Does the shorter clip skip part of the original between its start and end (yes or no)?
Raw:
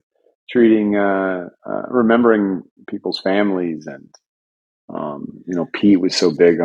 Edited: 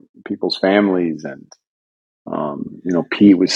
no